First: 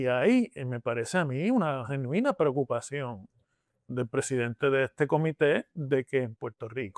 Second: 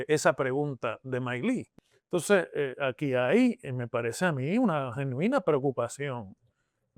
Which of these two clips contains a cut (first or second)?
second